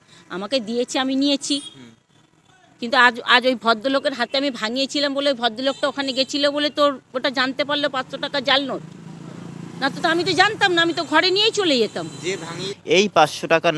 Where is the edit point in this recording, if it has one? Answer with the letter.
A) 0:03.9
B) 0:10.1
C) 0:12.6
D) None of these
C